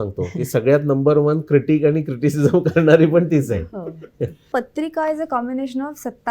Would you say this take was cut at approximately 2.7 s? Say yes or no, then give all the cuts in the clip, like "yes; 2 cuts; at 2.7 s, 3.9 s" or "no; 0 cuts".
no; 1 cut; at 4.4 s